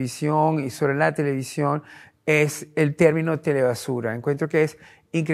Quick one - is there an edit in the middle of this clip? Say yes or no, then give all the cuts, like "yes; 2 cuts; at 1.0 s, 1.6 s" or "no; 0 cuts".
no; 0 cuts